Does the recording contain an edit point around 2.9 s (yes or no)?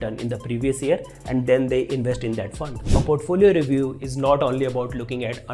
yes